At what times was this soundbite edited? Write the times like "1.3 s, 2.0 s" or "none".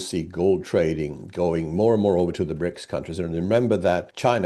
none